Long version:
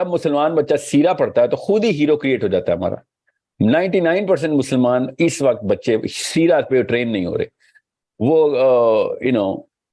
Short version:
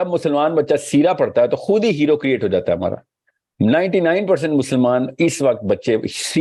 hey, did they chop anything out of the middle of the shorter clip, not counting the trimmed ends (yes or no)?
no